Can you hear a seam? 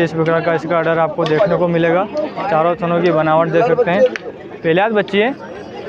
no; 0 cuts

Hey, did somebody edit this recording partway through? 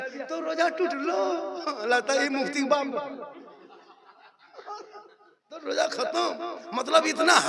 no; 0 cuts

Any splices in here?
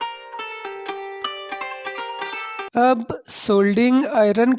yes; 2 cuts; at 1.0 s, 2.5 s

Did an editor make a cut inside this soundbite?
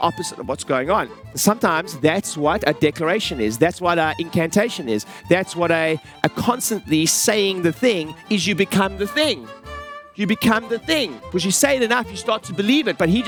no; 0 cuts

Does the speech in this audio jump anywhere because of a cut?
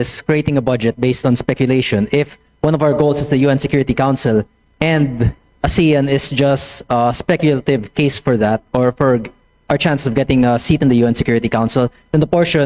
no; 0 cuts

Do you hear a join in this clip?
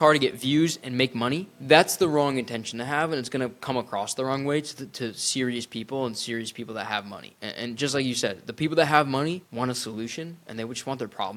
yes; 3 cuts; at 1.5 s, 7.3 s, 9.5 s

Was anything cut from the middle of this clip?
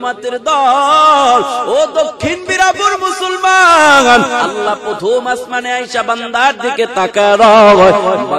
yes; 1 cut; at 4.5 s

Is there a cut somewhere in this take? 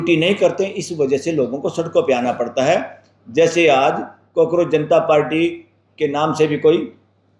no; 0 cuts

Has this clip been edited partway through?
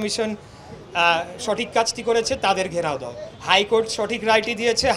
no; 0 cuts

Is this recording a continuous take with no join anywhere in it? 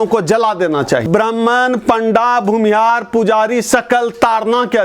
no; 1 cut; at 1.0 s

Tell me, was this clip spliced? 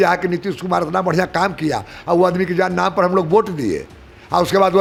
no; 0 cuts

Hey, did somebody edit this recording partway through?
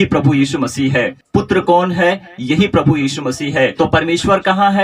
yes; 2 cuts; at 1.2 s, 3.7 s

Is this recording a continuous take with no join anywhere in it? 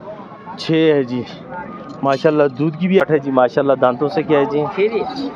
no; 1 cut; at 3.0 s

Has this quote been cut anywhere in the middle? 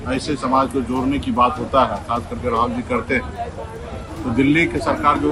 no; 0 cuts

